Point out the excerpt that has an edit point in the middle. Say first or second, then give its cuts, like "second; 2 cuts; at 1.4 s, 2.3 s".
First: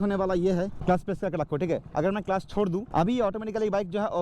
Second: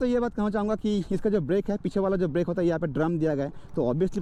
first; 2 cuts; at 0.8 s, 2.8 s